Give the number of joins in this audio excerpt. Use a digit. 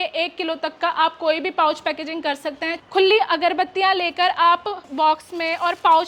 2